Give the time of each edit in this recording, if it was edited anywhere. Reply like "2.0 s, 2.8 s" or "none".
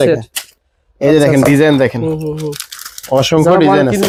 none